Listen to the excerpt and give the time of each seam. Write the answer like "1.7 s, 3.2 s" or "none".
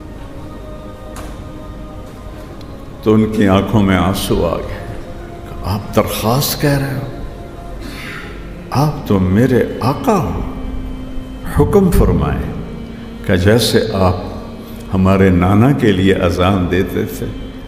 none

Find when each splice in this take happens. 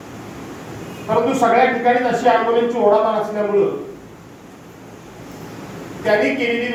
none

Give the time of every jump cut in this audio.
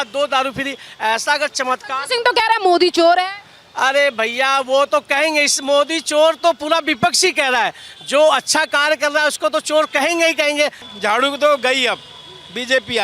10.8 s

